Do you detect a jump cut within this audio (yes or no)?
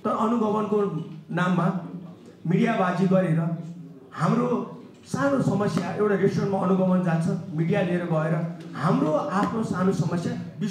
no